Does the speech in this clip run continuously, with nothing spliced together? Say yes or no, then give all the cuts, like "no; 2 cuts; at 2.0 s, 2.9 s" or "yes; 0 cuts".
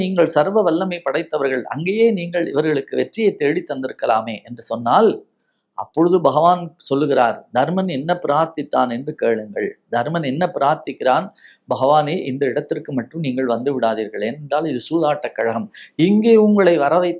yes; 0 cuts